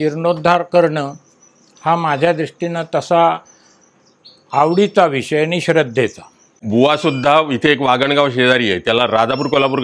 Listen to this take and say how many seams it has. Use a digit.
1